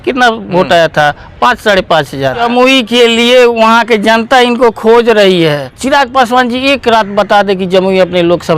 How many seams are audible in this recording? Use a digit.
2